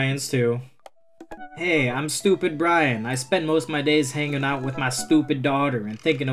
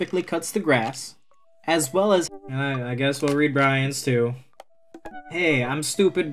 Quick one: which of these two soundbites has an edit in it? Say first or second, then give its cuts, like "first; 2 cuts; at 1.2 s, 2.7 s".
second; 1 cut; at 2.3 s